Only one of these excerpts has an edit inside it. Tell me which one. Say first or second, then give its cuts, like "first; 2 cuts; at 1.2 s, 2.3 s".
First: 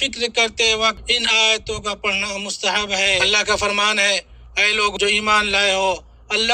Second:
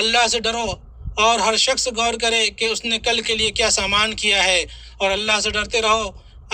first; 3 cuts; at 1.0 s, 3.2 s, 4.9 s